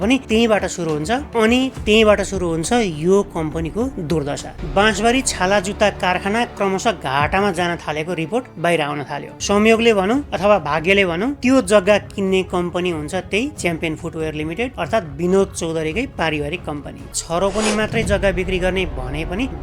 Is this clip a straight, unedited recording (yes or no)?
no